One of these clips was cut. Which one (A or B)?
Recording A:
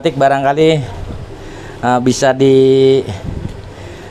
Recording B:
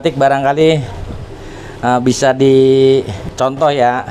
B